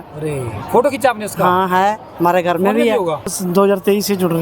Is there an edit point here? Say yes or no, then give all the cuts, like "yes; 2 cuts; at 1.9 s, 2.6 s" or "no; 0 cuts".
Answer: yes; 1 cut; at 3.3 s